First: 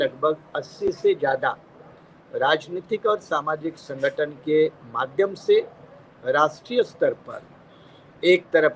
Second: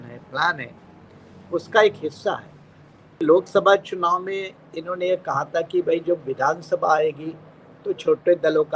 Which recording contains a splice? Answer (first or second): second